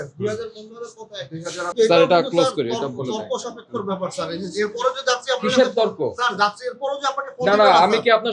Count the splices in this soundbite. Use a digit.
1